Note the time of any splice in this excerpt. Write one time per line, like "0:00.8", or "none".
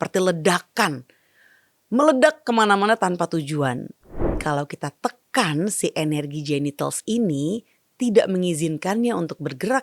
0:04.4